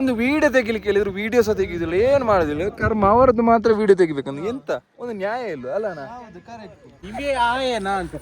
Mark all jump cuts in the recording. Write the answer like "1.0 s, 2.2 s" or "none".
6.9 s